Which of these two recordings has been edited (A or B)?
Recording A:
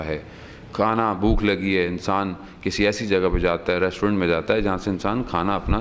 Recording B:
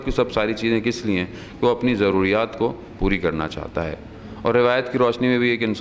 B